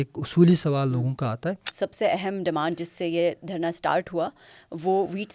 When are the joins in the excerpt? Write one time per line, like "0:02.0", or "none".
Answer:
0:01.7